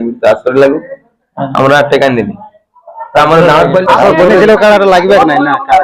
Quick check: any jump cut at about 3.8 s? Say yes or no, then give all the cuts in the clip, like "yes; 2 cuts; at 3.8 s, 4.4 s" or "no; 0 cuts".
yes; 1 cut; at 3.8 s